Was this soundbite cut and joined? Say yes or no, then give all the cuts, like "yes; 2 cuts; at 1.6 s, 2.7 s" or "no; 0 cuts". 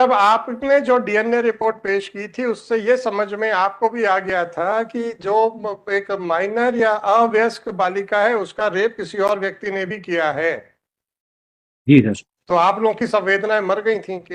no; 0 cuts